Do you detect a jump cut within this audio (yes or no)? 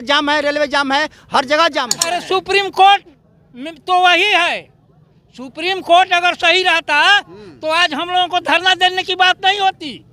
yes